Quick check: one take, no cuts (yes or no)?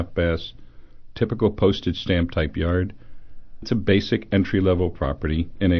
no